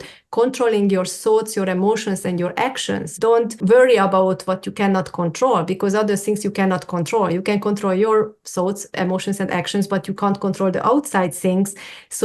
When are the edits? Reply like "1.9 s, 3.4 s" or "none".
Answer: 3.2 s